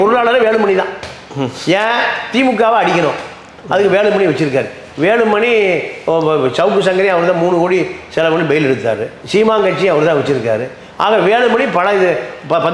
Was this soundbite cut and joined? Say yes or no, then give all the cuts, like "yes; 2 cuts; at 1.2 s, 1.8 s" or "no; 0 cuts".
no; 0 cuts